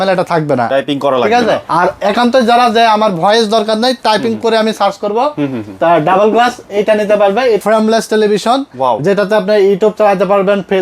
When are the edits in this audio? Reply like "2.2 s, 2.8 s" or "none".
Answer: 1.6 s, 7.6 s